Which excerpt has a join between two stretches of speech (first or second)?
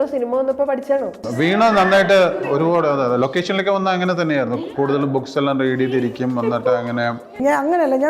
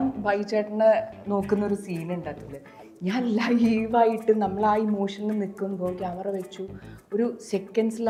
first